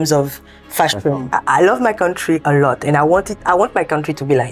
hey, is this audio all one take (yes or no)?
no